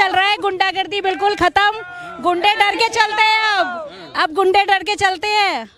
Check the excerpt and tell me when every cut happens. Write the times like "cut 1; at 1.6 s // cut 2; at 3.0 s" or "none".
none